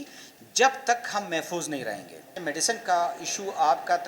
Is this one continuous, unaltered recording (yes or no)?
no